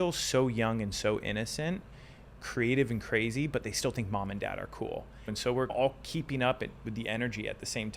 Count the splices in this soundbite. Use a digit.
2